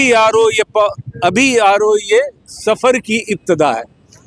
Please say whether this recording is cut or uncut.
uncut